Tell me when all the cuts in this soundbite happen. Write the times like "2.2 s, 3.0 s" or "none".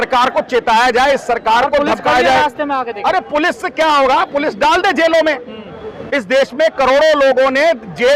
none